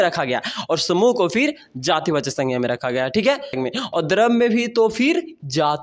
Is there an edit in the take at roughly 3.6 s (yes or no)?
yes